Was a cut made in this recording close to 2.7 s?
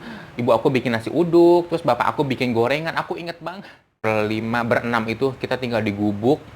no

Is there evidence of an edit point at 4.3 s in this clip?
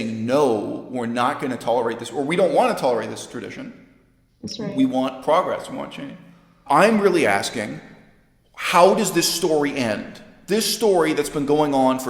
no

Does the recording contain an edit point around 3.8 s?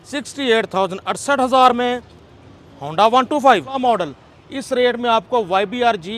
yes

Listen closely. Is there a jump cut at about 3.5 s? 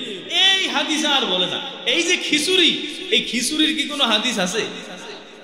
no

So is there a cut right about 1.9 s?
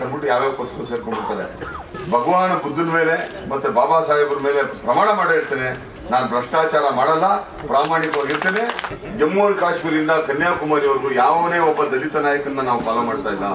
yes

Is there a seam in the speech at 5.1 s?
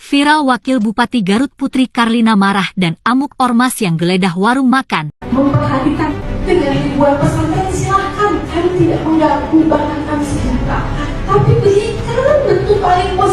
yes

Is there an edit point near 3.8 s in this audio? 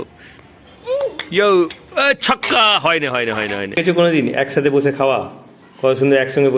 yes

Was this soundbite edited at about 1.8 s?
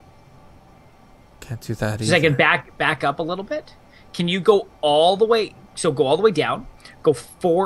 yes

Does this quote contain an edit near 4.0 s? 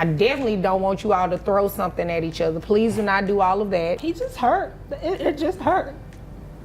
yes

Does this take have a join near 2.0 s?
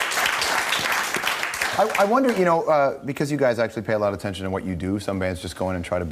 no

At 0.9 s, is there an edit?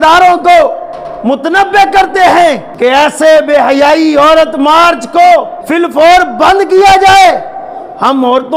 no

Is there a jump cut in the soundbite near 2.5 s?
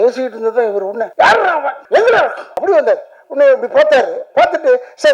yes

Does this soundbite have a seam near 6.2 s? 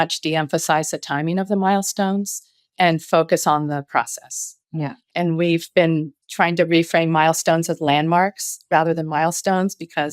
yes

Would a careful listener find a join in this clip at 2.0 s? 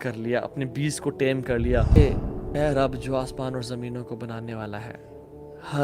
yes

